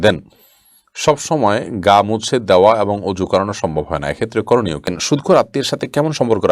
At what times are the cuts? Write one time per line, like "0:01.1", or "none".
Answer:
0:05.0